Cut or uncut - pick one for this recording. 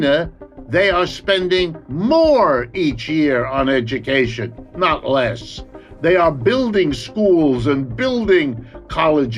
uncut